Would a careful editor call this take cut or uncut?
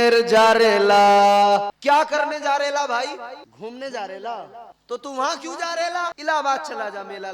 cut